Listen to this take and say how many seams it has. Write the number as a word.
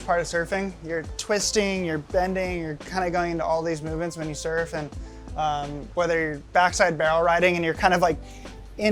zero